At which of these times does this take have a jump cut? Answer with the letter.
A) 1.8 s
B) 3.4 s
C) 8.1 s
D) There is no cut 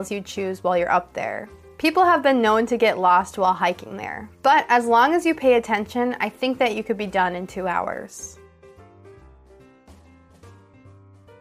C